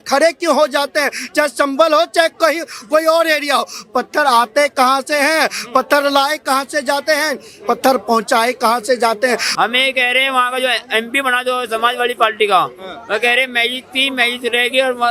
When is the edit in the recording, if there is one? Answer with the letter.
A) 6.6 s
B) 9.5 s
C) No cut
B